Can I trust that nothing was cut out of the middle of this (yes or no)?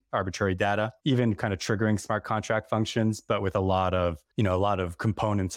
no